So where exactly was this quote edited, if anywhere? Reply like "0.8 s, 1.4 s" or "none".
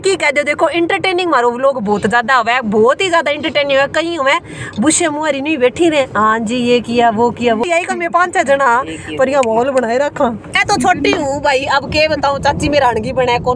7.6 s, 10.5 s